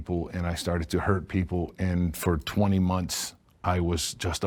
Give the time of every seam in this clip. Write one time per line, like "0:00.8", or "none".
none